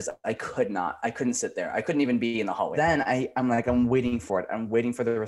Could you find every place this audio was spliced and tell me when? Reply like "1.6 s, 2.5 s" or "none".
2.7 s